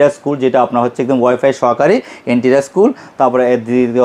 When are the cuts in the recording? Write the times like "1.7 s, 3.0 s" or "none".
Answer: none